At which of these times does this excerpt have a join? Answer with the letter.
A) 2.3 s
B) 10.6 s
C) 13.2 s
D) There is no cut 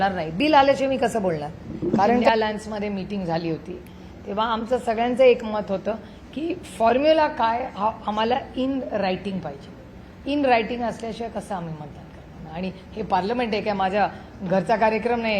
A